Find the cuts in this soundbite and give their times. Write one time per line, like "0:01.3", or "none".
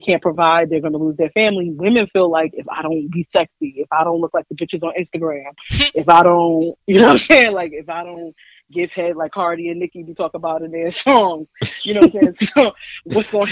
none